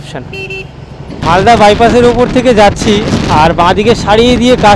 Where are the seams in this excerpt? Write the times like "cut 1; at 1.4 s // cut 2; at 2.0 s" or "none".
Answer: cut 1; at 1.2 s